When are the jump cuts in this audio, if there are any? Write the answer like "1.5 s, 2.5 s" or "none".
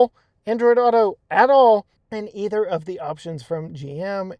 2.0 s